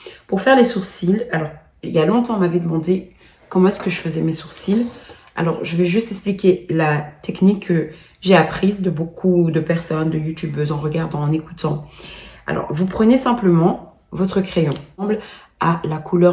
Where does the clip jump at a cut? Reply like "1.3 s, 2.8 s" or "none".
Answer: none